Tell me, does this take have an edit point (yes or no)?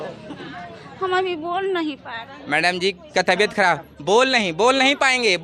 no